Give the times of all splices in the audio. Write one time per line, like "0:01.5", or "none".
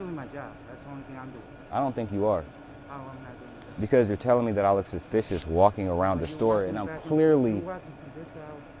none